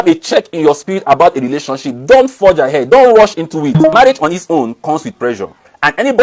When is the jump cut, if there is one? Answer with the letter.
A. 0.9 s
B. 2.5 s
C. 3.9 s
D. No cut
C